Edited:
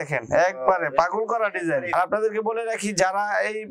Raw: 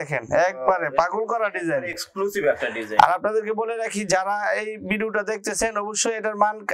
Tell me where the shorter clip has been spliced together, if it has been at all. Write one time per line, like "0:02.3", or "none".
0:02.0